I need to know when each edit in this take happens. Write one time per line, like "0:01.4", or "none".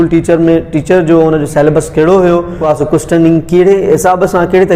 0:02.6